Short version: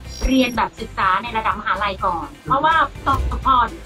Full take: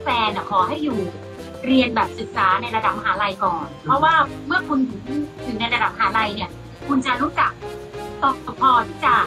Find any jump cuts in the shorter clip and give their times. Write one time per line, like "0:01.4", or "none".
0:03.0